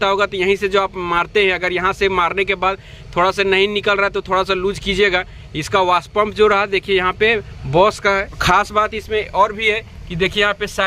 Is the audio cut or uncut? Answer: cut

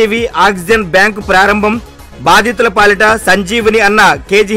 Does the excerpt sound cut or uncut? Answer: uncut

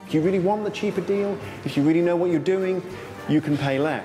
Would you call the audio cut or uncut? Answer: uncut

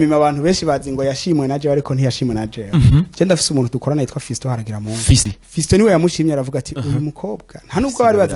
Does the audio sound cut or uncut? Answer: cut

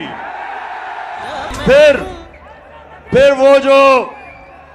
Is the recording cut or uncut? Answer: uncut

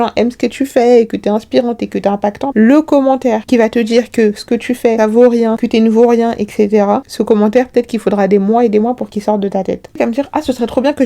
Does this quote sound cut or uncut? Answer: cut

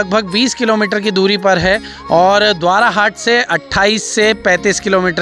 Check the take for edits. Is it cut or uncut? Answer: uncut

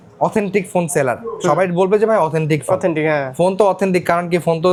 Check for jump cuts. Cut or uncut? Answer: uncut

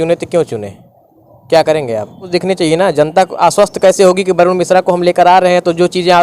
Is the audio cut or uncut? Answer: cut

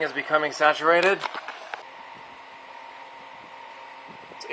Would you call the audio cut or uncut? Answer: cut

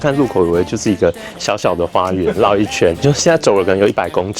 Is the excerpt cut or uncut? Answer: cut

